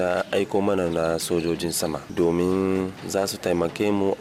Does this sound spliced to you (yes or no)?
yes